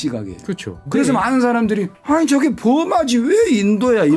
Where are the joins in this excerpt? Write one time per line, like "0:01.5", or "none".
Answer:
0:00.8
0:01.9